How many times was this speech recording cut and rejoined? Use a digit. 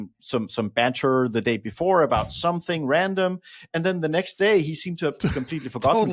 0